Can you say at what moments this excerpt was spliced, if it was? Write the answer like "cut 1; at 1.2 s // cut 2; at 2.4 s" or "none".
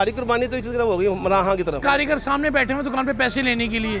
cut 1; at 1.8 s